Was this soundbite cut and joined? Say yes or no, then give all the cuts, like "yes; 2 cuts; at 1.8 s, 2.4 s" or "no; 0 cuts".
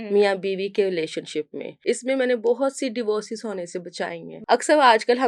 yes; 2 cuts; at 1.7 s, 4.3 s